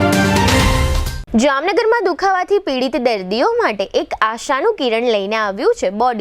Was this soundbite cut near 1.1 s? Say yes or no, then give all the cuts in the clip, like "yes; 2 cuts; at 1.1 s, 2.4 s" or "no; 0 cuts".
yes; 1 cut; at 1.1 s